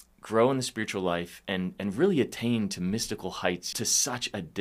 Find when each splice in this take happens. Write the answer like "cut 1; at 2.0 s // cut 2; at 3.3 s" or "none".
cut 1; at 3.7 s